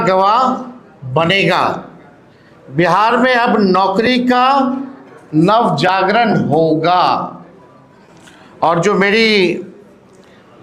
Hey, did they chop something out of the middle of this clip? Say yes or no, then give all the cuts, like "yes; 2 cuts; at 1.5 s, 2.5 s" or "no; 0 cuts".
no; 0 cuts